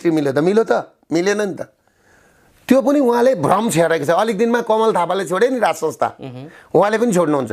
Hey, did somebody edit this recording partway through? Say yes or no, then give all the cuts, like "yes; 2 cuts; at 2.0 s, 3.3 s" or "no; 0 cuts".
no; 0 cuts